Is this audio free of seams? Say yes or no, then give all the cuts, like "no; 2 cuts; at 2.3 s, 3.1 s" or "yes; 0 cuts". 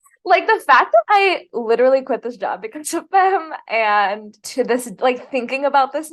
no; 1 cut; at 4.4 s